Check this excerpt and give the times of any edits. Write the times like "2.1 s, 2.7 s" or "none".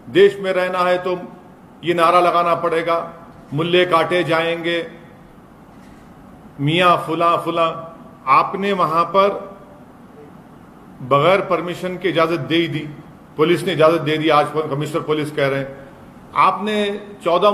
8.3 s